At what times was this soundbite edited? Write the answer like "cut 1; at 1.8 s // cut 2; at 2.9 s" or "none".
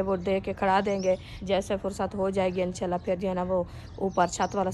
cut 1; at 1.3 s